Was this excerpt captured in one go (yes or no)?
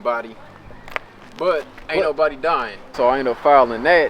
no